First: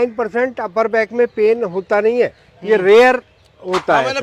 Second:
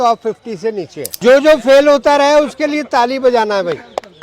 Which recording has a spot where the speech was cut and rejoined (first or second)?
second